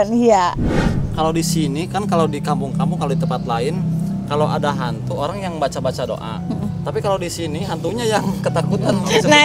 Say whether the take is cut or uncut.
cut